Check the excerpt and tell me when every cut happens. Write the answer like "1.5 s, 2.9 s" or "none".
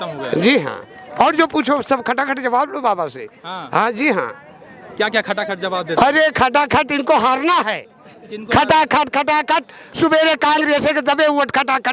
none